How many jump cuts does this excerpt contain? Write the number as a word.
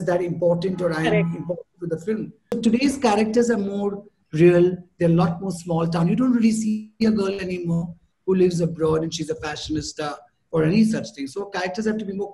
one